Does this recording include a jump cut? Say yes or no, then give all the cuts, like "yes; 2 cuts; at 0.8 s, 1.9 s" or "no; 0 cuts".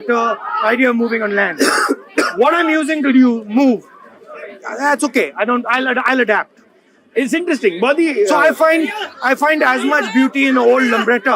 no; 0 cuts